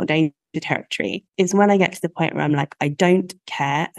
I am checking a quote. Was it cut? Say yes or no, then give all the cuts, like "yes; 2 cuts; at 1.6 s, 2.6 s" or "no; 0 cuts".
yes; 1 cut; at 1.2 s